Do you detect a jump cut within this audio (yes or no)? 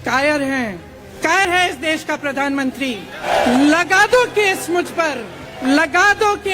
yes